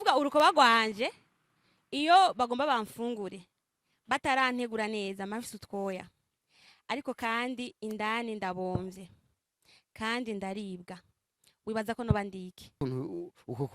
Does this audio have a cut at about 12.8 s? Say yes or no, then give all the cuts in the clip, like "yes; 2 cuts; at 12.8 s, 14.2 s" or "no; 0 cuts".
yes; 1 cut; at 12.8 s